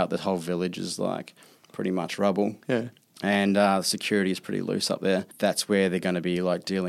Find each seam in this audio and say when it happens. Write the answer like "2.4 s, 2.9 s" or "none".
5.3 s